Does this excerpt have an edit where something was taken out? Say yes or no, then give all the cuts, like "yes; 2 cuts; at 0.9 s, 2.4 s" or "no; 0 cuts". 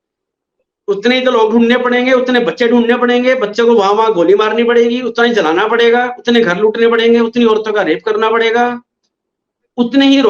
no; 0 cuts